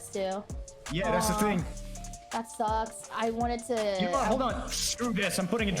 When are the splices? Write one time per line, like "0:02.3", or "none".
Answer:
0:01.8

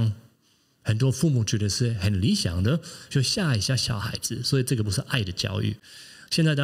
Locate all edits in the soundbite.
none

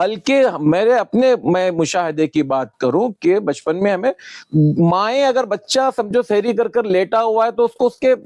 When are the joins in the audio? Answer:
none

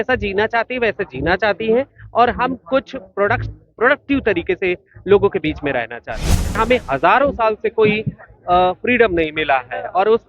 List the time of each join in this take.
0:06.6

